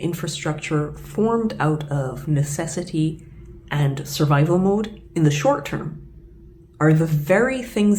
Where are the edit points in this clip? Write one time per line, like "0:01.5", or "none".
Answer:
none